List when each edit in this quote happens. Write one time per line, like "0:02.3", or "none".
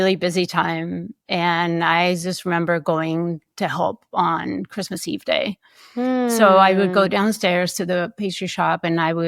0:07.1